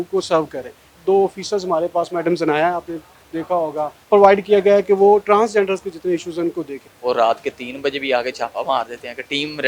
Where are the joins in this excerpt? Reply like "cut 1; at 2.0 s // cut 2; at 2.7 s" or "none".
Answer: cut 1; at 1.0 s // cut 2; at 4.0 s // cut 3; at 6.9 s